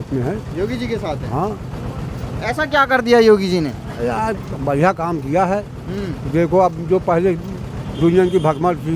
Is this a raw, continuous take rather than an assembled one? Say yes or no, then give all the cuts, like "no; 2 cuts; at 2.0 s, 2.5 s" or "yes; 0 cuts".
yes; 0 cuts